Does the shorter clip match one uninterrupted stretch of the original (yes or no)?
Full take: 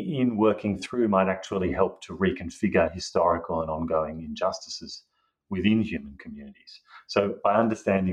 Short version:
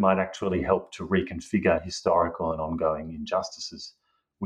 yes